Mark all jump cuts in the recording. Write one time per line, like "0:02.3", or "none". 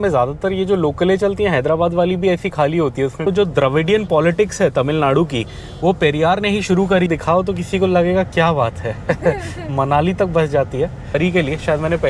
0:03.2
0:07.1
0:11.2